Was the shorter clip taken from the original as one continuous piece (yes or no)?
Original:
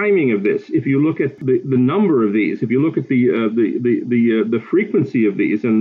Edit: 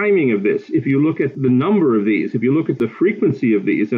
no